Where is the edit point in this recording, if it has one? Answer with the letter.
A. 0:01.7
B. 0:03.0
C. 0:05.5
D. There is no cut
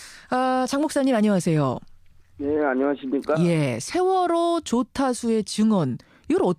B